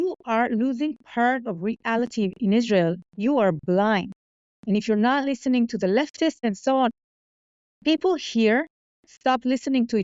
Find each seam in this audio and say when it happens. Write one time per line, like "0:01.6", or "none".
0:06.5